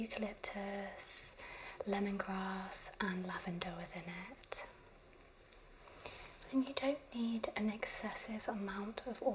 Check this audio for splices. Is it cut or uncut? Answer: cut